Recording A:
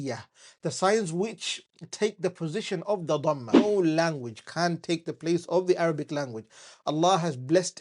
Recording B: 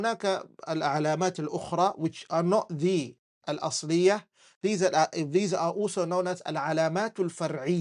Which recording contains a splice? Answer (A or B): A